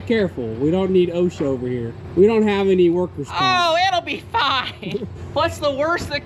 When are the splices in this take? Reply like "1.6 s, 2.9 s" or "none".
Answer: 1.9 s, 5.2 s